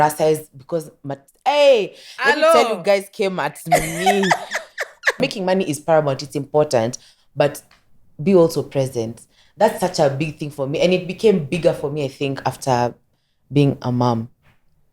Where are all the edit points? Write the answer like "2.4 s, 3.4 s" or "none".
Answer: 5.2 s